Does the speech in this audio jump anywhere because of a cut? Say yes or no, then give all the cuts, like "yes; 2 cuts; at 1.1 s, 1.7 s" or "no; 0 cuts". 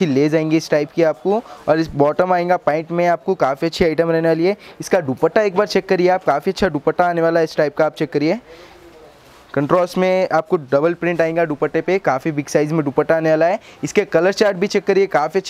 no; 0 cuts